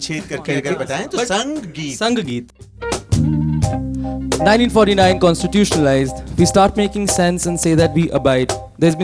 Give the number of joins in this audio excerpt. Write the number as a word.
one